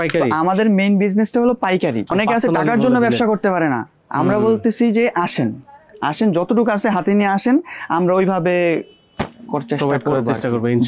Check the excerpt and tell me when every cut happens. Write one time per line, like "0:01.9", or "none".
0:02.1